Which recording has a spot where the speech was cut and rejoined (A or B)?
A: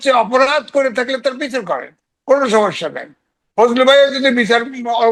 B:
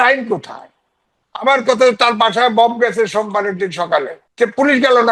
B